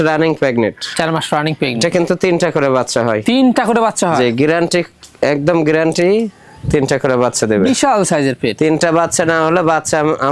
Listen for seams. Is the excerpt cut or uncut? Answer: uncut